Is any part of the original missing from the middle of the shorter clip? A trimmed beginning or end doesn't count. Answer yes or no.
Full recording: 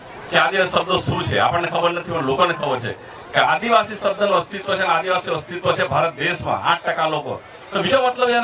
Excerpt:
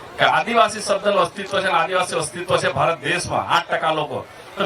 no